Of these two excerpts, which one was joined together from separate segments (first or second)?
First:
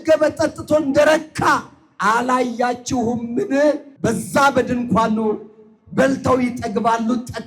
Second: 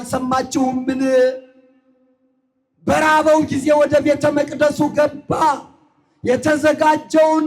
first